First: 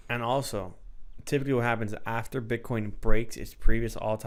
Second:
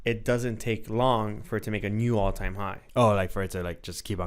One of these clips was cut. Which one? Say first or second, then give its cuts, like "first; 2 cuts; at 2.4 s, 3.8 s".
second; 1 cut; at 2.8 s